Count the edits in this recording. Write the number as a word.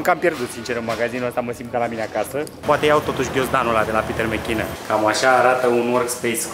two